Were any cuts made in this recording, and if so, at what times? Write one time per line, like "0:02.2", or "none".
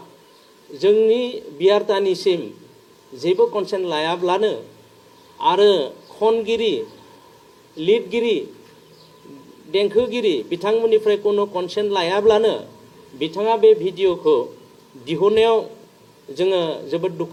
none